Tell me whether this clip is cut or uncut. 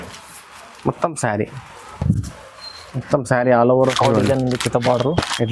cut